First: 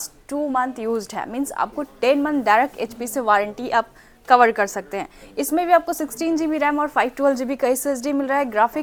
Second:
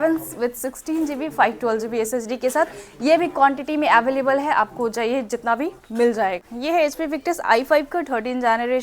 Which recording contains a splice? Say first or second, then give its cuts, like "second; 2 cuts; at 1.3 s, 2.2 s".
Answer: second; 1 cut; at 6.5 s